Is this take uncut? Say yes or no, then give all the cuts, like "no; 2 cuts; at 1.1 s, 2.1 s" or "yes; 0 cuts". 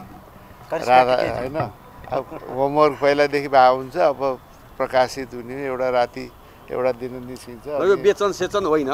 yes; 0 cuts